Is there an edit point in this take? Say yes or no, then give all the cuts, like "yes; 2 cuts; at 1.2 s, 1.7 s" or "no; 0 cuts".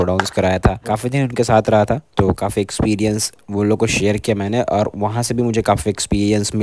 no; 0 cuts